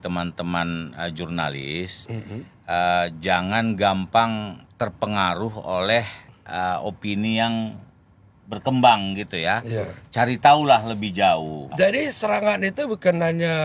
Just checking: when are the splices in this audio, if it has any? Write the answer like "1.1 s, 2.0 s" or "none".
11.7 s